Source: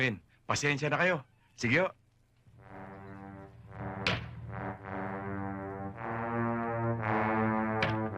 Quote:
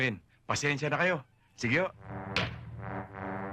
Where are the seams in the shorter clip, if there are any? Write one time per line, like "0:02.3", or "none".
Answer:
0:02.0